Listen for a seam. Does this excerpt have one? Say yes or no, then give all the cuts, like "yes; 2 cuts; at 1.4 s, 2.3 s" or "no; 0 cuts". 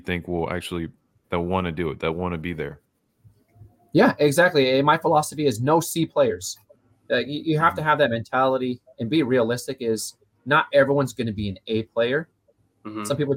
no; 0 cuts